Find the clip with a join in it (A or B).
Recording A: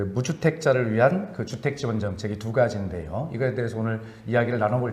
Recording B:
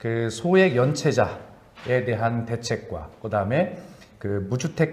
B